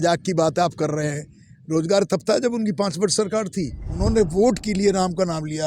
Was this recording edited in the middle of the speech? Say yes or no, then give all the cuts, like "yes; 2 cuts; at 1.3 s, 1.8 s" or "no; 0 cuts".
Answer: yes; 1 cut; at 3.9 s